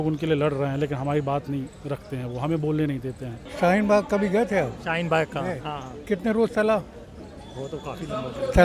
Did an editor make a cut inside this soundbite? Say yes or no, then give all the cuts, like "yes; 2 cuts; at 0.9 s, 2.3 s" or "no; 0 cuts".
yes; 1 cut; at 3.4 s